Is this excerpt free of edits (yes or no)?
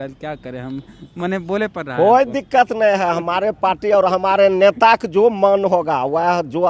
yes